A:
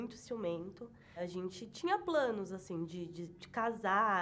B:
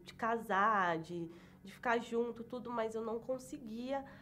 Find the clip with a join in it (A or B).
A